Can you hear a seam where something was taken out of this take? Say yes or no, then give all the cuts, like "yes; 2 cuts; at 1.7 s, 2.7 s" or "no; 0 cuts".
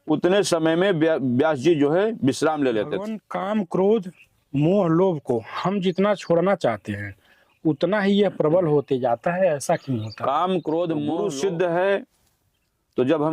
yes; 2 cuts; at 3.3 s, 11.1 s